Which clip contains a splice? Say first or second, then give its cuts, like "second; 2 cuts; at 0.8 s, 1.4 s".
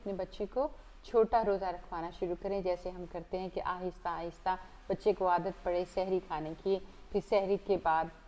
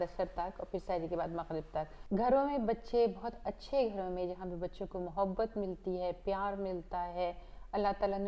second; 1 cut; at 2.0 s